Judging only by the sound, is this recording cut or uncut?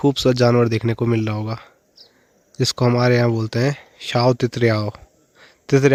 uncut